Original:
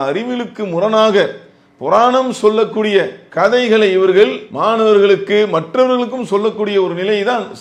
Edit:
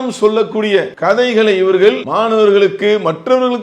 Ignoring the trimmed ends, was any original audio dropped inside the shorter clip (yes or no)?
yes